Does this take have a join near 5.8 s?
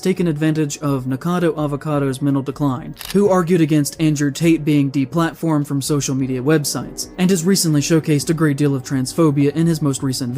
no; 1 cut; at 3.0 s

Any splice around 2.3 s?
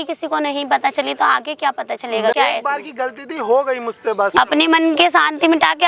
yes; 2 cuts; at 2.3 s, 4.3 s

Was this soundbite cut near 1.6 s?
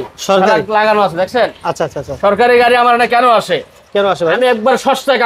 no; 0 cuts

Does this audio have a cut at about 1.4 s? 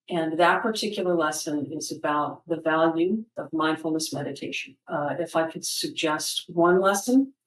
no; 2 cuts; at 3.4 s, 4.8 s

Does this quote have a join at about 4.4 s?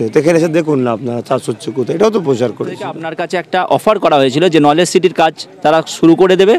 no; 1 cut; at 3.1 s

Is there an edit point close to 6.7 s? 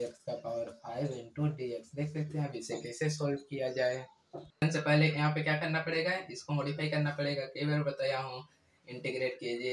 no; 1 cut; at 4.6 s

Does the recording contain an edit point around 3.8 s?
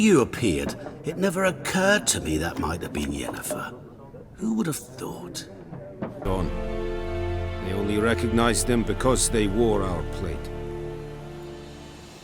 no; 1 cut; at 6.2 s

